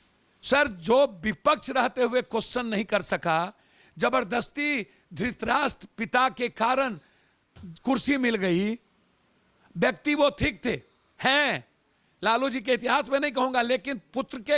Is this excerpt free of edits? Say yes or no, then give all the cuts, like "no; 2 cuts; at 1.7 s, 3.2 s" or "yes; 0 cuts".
yes; 0 cuts